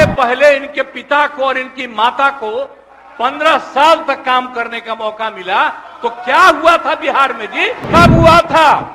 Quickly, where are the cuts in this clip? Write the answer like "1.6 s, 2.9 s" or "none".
7.8 s